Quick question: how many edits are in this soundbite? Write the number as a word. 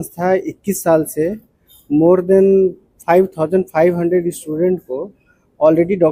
zero